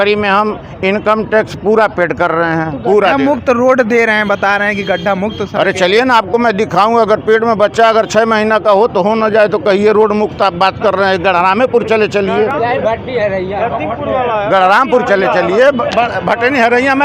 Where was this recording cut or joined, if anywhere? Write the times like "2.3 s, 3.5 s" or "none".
none